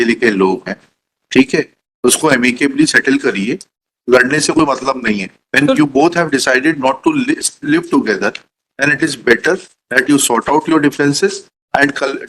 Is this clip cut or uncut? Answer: uncut